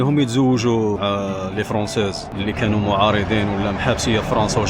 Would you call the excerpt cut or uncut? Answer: cut